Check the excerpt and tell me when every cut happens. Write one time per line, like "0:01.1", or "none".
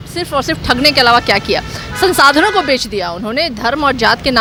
none